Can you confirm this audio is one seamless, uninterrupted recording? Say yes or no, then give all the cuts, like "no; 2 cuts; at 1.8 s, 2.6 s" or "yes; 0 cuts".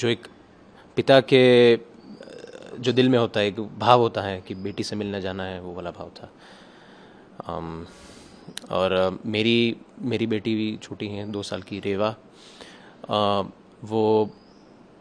yes; 0 cuts